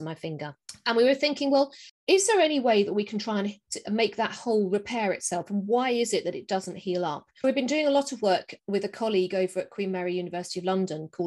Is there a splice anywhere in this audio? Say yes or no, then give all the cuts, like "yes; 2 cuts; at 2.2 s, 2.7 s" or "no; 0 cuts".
yes; 1 cut; at 7.4 s